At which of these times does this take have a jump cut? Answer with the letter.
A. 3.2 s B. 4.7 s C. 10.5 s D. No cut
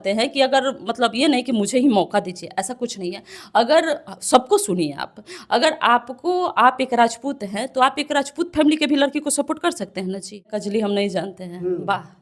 C